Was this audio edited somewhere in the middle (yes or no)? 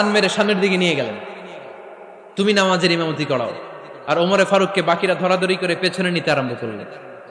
no